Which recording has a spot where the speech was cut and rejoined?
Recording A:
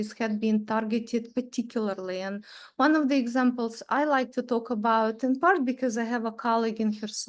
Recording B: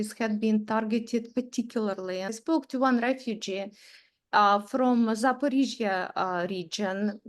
B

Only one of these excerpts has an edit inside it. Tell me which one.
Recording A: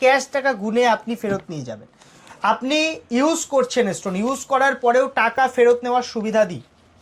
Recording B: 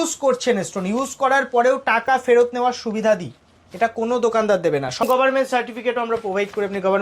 B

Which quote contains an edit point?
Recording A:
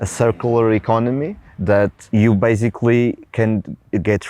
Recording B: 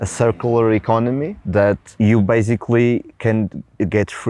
B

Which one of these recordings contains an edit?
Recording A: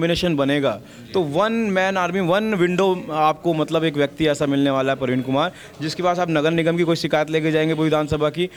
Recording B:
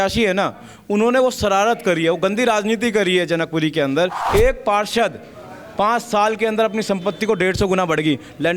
B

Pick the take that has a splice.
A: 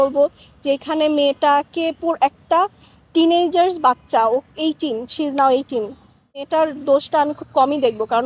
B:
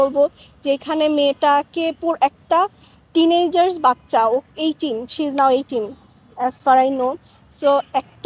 A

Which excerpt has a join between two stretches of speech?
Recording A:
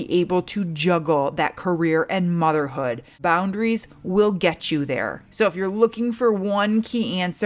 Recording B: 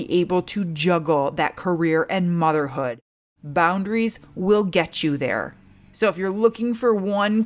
A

